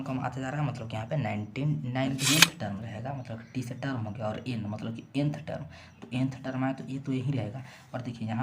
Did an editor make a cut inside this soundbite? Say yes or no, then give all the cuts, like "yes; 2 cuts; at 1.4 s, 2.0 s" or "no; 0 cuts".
yes; 1 cut; at 2.2 s